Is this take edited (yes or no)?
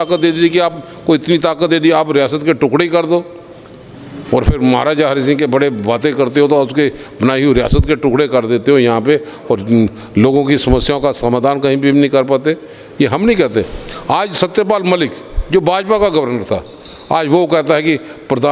no